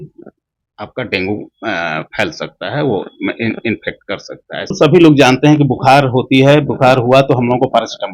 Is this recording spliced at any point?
yes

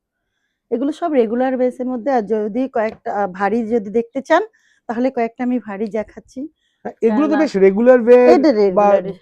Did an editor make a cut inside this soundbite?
no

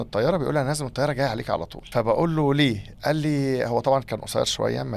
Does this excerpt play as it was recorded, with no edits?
no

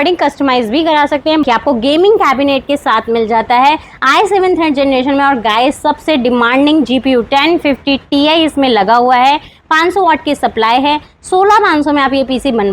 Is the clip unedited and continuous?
no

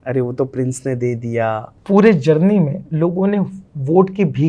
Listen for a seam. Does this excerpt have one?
yes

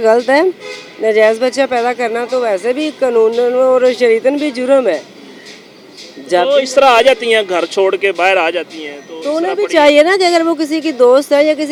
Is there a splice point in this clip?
no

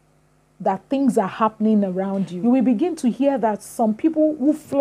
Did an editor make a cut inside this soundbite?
yes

